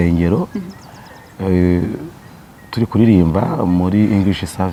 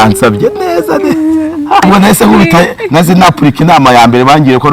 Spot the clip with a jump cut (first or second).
second